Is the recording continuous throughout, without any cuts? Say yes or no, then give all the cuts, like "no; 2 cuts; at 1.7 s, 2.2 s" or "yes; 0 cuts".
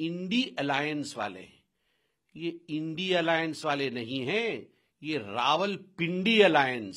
yes; 0 cuts